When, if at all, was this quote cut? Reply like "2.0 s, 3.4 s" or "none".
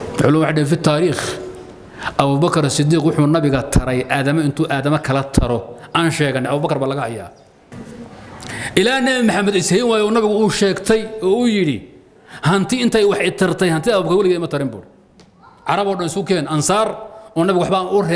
7.7 s